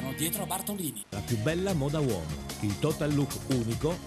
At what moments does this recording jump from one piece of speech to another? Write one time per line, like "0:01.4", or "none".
0:00.9